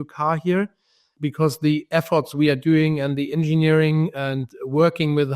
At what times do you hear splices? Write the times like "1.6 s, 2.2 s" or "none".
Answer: 1.1 s